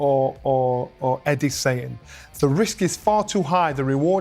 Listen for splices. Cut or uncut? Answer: uncut